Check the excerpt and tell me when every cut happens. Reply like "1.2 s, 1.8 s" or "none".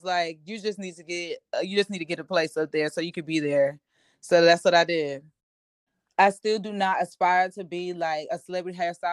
5.5 s

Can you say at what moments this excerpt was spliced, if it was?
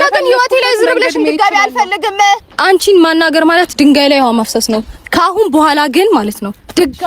2.5 s

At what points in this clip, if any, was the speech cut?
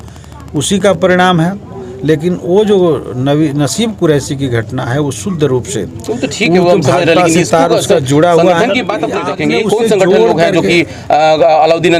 9.2 s

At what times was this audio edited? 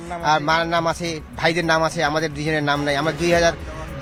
none

